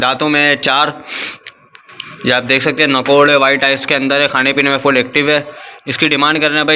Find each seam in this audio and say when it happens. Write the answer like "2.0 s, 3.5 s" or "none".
none